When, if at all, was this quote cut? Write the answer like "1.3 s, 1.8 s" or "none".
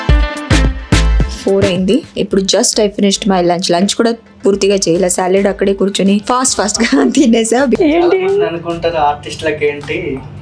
1.3 s, 7.8 s